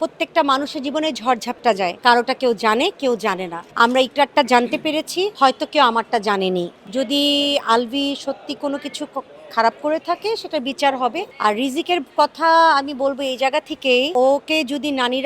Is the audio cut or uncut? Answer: cut